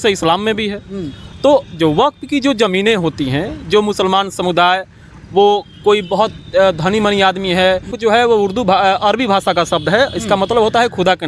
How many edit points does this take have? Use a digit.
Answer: 1